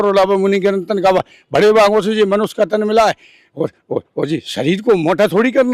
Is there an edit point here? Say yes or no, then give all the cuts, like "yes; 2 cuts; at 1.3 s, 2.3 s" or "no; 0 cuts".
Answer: no; 0 cuts